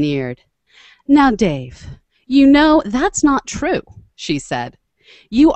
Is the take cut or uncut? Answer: cut